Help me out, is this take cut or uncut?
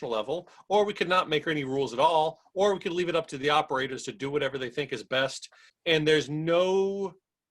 cut